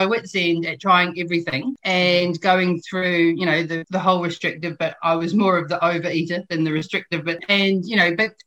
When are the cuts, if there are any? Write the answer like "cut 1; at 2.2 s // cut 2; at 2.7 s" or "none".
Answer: cut 1; at 1.7 s // cut 2; at 3.8 s // cut 3; at 7.4 s